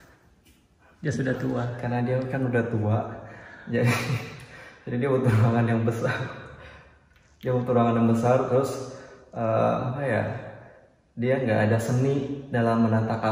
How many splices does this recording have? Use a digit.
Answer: 0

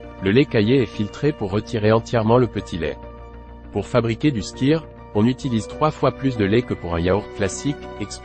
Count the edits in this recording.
1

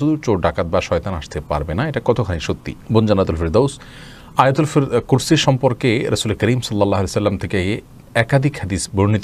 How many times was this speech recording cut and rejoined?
0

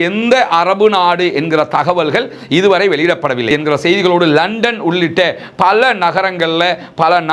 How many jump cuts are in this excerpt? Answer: 1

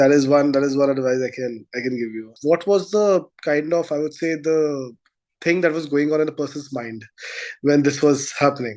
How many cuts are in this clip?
1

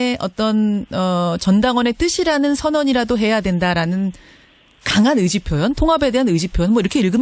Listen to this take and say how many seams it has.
1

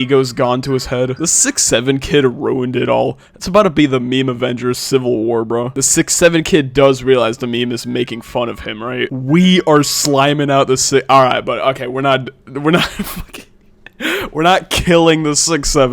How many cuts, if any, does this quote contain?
3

